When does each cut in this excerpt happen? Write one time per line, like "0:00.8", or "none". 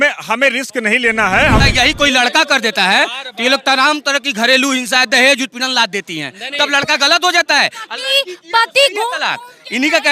0:01.6